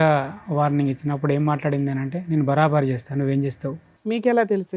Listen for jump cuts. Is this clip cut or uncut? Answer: cut